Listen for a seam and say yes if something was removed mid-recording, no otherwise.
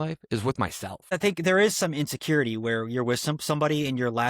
yes